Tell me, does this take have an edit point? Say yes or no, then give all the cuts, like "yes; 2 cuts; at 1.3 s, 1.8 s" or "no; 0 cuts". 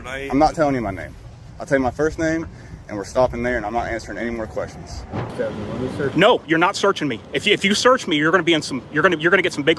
yes; 1 cut; at 5.3 s